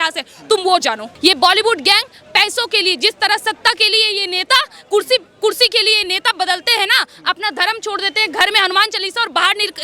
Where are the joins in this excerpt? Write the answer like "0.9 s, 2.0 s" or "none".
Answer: 1.1 s